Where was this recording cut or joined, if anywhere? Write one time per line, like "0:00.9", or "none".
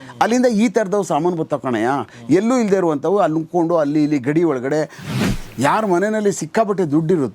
0:05.0